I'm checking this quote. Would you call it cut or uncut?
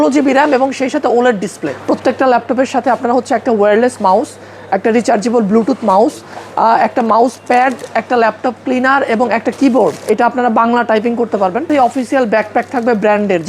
cut